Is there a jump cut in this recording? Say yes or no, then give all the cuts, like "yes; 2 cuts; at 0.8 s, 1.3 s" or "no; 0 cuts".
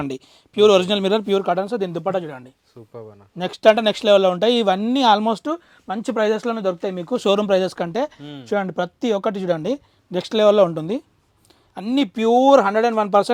no; 0 cuts